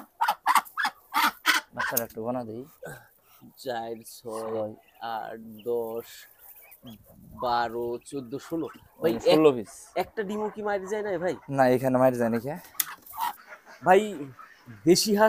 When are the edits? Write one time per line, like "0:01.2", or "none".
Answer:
0:13.4